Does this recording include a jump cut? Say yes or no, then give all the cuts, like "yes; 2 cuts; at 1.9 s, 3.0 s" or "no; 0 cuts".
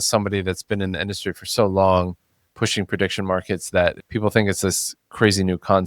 yes; 1 cut; at 4.0 s